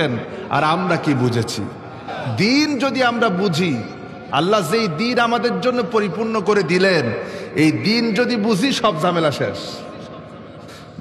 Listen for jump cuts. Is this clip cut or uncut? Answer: cut